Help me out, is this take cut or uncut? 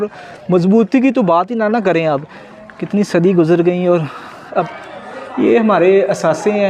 cut